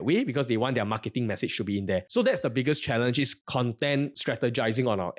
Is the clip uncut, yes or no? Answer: no